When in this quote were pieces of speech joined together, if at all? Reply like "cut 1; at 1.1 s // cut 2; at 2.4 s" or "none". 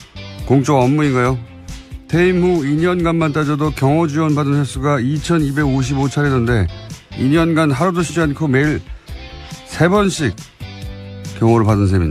none